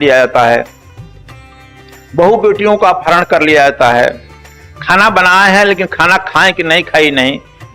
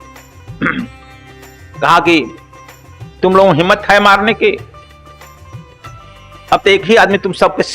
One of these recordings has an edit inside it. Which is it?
second; 2 cuts; at 4.7 s, 6.4 s

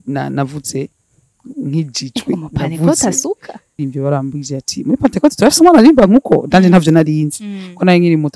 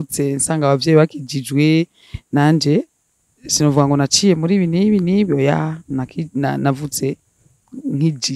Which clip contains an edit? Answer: first; 1 cut; at 3.8 s

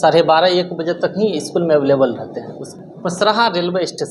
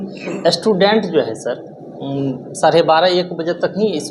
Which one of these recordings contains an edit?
first; 1 cut; at 2.6 s

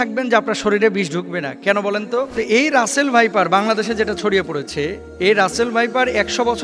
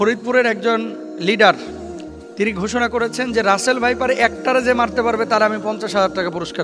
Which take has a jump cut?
first; 2 cuts; at 2.3 s, 5.0 s

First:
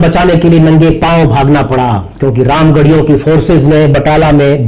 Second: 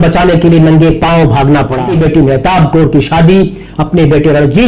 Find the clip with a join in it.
second; 1 cut; at 1.9 s

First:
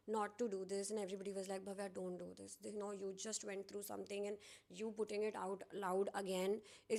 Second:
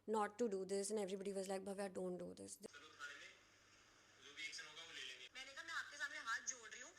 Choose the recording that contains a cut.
second; 1 cut; at 2.6 s

